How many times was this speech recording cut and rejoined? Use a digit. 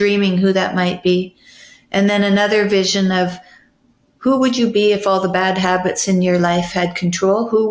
0